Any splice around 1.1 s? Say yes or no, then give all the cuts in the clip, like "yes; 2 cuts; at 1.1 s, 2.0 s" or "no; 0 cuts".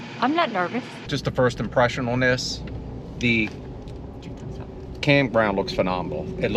yes; 1 cut; at 1.1 s